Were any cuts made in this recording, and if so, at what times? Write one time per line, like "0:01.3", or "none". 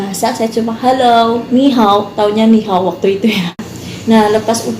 0:03.7